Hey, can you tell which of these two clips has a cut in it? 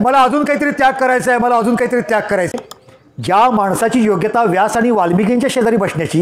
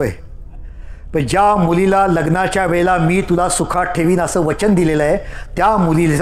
first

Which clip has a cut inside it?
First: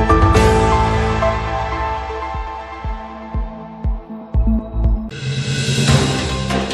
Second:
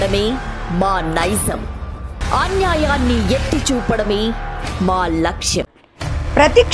first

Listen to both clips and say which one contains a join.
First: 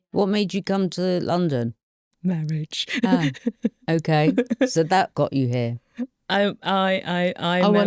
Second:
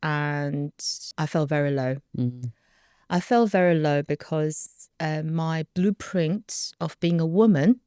second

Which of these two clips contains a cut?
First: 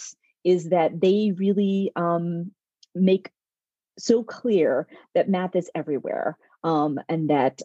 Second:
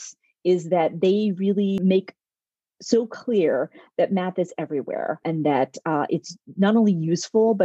second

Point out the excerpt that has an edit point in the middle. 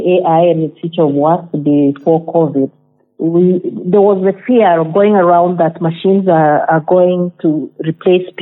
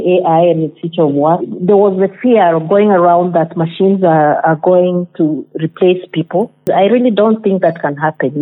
second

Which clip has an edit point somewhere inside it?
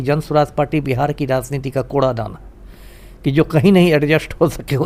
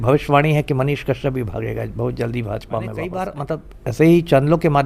second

